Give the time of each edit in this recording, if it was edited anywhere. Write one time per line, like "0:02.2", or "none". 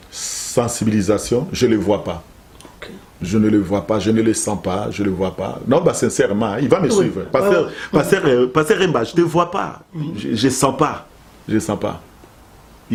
none